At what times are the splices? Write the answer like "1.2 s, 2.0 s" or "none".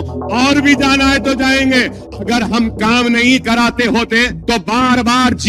2.0 s, 4.4 s